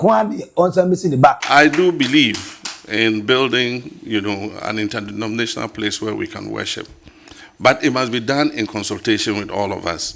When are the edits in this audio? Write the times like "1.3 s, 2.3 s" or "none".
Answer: 1.4 s